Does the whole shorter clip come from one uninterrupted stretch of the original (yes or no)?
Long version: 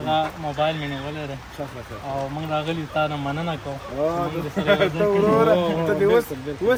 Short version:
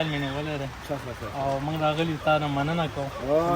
yes